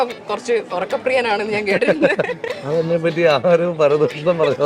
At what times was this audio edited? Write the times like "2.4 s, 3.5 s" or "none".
2.4 s